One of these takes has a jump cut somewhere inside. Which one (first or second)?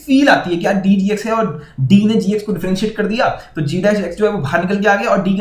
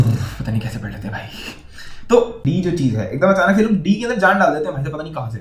second